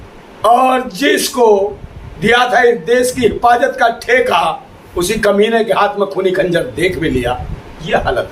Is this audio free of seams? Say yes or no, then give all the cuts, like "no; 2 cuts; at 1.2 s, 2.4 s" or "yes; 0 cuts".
yes; 0 cuts